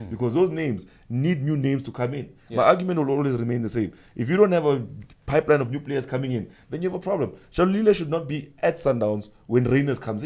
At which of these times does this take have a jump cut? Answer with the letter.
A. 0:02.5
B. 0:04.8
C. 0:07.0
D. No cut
D